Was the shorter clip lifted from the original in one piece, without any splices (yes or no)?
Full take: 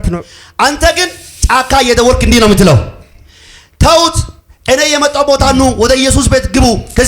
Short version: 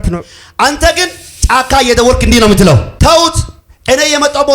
no